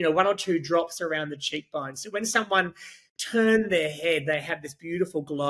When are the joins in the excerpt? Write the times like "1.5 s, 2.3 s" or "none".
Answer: none